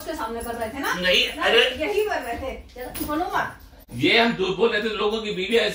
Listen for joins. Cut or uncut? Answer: uncut